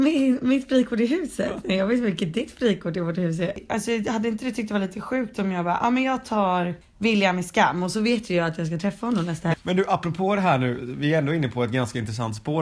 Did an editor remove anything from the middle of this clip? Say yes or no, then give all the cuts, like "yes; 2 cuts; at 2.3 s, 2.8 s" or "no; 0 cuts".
yes; 3 cuts; at 3.6 s, 6.8 s, 9.6 s